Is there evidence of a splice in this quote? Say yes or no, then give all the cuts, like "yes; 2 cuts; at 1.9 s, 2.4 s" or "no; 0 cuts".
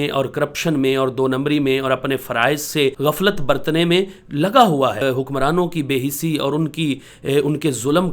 yes; 2 cuts; at 3.0 s, 5.0 s